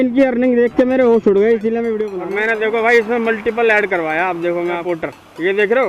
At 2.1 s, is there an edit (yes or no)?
yes